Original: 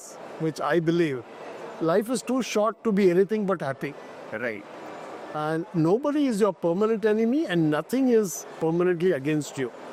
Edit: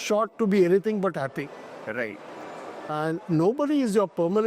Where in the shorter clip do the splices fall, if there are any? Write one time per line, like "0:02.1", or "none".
none